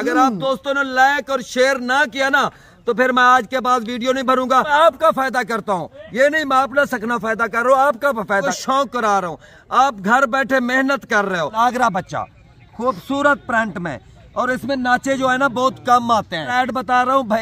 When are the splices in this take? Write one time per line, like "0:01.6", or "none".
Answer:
0:04.7
0:08.5
0:11.5
0:16.5